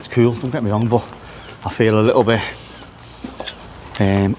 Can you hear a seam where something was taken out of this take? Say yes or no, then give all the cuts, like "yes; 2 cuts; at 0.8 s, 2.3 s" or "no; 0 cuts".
no; 0 cuts